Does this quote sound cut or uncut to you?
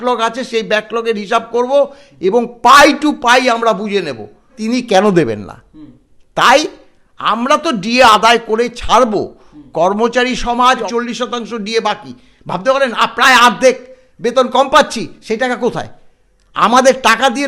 cut